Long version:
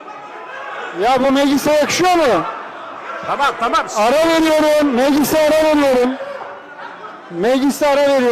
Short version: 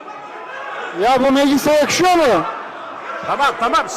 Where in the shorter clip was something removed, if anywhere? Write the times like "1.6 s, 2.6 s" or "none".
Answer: none